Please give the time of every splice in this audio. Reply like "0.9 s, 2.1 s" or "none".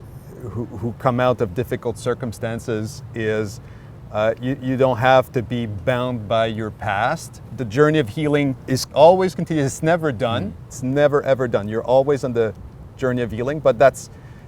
7.5 s, 8.8 s, 10.7 s